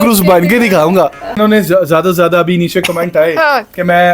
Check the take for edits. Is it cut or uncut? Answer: cut